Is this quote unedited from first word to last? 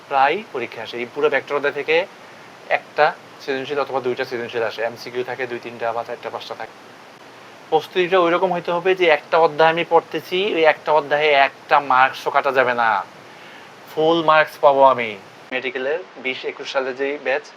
no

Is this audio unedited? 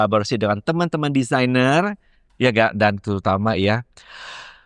yes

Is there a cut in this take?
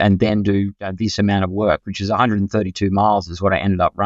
yes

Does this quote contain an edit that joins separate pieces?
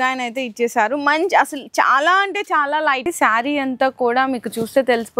yes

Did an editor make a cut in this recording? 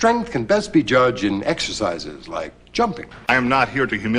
yes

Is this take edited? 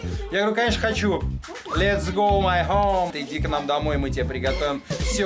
no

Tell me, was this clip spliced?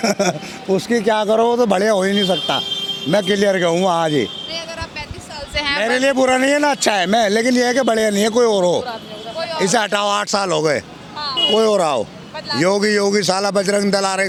no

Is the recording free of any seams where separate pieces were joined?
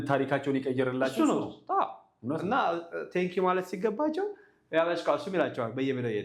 yes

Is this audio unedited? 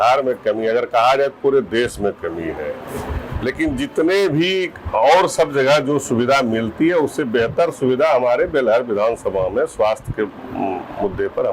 yes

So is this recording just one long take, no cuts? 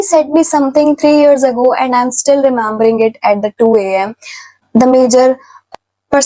yes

